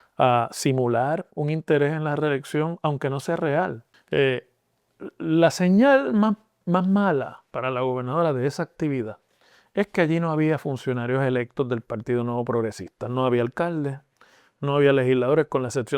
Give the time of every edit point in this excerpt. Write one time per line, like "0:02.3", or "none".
0:03.9